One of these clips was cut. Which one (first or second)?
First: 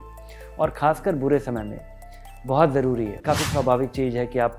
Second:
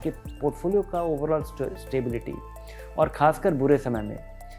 first